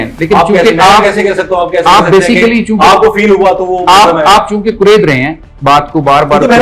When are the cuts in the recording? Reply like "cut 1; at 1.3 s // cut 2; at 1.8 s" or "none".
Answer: none